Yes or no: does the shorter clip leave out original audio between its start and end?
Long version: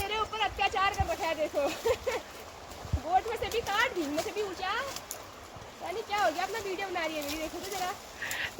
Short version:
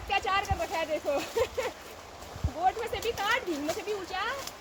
no